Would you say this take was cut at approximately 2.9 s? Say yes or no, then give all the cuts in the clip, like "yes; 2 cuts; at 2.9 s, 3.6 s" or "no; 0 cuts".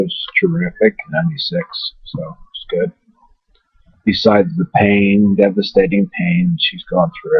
no; 0 cuts